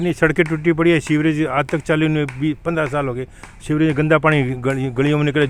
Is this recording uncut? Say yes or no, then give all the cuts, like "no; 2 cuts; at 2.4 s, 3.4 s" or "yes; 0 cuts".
yes; 0 cuts